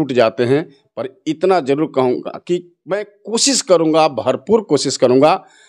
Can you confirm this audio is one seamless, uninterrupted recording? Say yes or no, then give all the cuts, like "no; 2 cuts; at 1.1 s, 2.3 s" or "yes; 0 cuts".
yes; 0 cuts